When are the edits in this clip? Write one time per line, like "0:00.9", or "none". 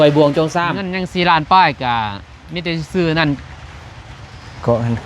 0:01.4